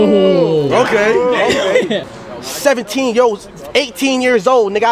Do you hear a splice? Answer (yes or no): yes